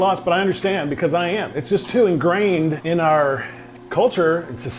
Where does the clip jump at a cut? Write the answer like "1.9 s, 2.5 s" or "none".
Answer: 2.8 s